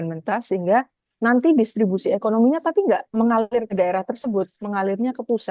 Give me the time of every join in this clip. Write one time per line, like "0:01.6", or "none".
0:03.3
0:04.6